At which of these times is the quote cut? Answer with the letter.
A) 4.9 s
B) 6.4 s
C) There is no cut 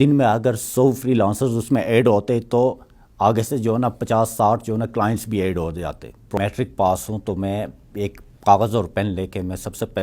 B